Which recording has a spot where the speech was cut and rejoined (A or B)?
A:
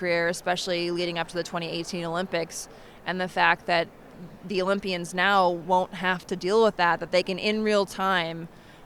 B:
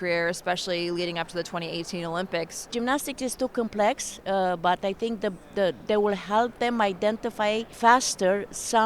B